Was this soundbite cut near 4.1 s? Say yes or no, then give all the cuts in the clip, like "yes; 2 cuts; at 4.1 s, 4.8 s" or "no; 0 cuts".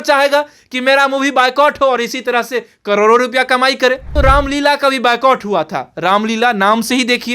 yes; 1 cut; at 4.1 s